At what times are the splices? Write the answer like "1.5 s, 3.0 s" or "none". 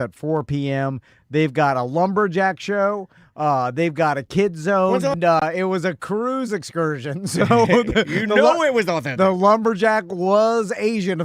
5.2 s